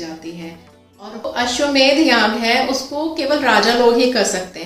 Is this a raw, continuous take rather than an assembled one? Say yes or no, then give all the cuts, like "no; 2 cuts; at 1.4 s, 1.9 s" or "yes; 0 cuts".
no; 1 cut; at 1.2 s